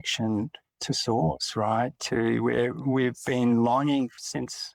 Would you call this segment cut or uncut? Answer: uncut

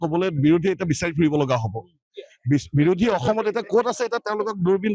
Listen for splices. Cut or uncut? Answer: uncut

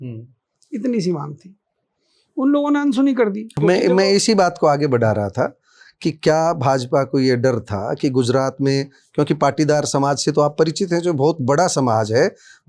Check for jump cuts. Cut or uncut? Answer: uncut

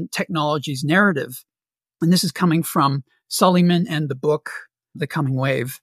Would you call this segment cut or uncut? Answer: uncut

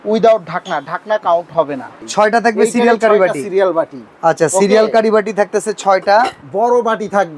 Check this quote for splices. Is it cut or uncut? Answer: cut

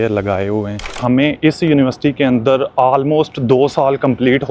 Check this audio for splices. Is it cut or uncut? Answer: cut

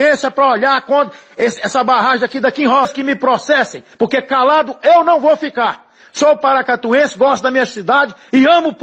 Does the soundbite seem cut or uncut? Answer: cut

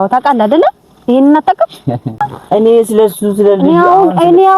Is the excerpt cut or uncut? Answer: cut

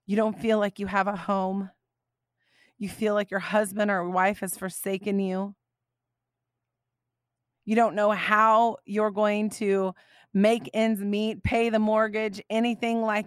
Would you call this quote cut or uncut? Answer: uncut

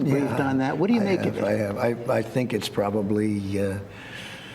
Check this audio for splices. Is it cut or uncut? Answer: cut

